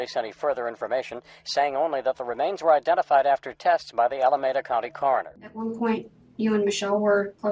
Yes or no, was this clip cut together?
yes